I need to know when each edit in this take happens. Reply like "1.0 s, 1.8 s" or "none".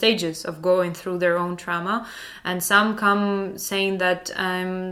none